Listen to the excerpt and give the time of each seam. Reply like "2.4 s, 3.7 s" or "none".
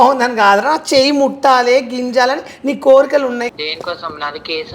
3.4 s